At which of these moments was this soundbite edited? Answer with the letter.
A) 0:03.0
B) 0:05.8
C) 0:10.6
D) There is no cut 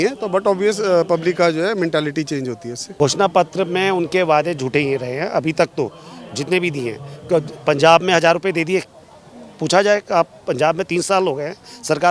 A